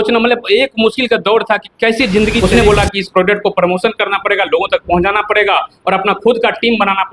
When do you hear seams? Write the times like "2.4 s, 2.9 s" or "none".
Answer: 2.4 s